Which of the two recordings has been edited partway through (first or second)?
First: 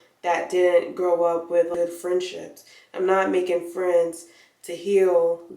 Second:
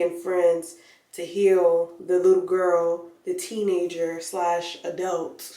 first